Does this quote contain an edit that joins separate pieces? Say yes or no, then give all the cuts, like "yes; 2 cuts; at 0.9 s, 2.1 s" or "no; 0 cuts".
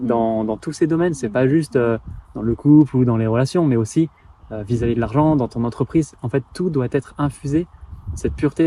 no; 0 cuts